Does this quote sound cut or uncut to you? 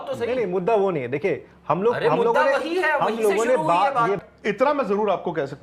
cut